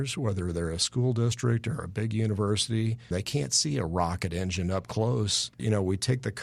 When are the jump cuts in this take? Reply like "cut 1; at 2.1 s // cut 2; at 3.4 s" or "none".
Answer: cut 1; at 3.1 s // cut 2; at 5.6 s